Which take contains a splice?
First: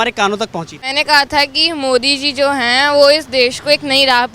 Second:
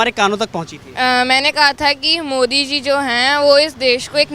first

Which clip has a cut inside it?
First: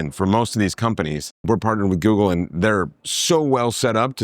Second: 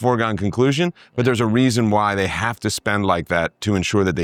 first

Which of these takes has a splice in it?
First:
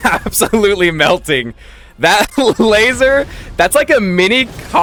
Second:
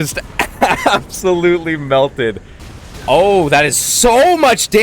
second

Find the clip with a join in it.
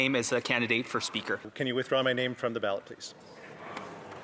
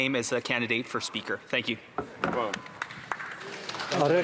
first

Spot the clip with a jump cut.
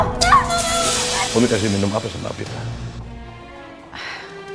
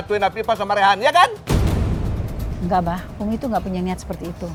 first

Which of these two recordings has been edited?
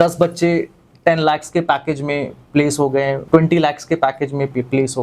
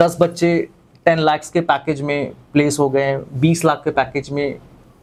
first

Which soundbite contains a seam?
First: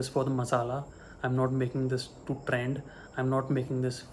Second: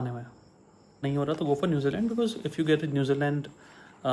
second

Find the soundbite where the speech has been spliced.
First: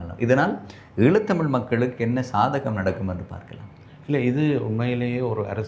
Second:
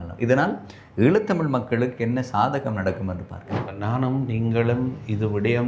second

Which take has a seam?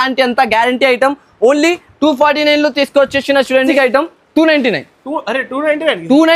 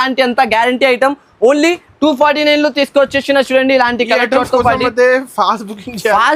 first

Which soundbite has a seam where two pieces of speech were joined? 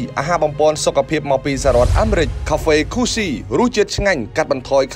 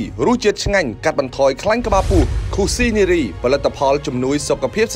first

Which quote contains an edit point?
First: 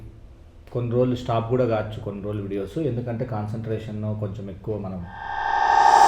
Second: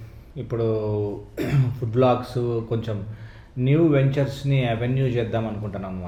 first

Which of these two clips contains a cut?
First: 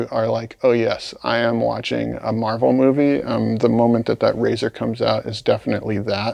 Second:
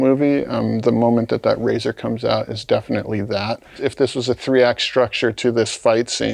second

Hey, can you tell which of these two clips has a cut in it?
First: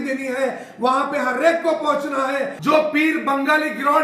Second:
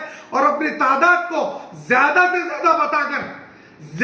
first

